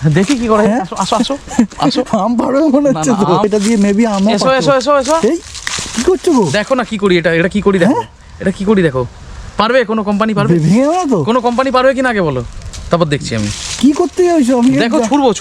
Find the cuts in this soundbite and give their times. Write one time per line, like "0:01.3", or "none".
0:03.5